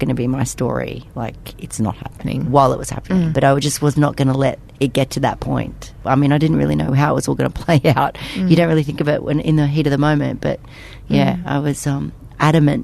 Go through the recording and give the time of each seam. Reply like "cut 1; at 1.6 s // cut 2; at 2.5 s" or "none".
cut 1; at 2.2 s // cut 2; at 3.3 s // cut 3; at 5.9 s